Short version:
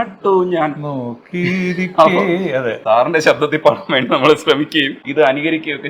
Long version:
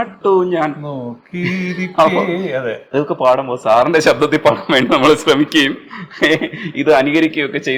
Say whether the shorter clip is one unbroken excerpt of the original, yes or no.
no